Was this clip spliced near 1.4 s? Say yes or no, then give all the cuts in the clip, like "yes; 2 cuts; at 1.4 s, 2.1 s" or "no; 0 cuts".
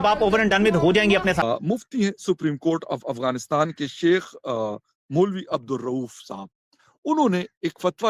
yes; 1 cut; at 1.4 s